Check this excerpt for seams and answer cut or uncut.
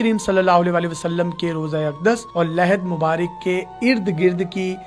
uncut